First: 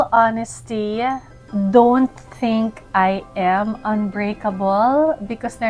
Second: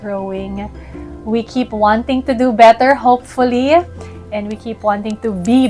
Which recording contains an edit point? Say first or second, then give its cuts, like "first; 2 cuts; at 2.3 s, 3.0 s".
first; 1 cut; at 1.3 s